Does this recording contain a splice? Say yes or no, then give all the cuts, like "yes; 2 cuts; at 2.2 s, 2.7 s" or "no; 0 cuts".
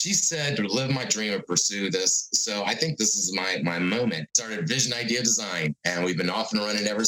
yes; 1 cut; at 4.3 s